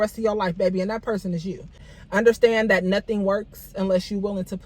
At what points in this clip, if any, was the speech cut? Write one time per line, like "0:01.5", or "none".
0:01.9